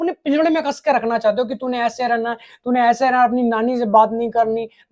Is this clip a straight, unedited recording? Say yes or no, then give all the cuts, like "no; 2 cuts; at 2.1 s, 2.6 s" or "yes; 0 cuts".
yes; 0 cuts